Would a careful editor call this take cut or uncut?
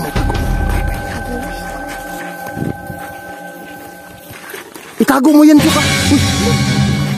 uncut